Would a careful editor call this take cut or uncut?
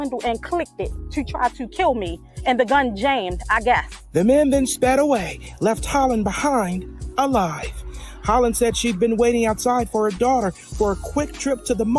uncut